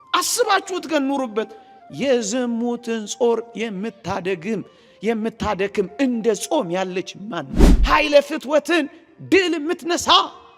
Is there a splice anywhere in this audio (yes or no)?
yes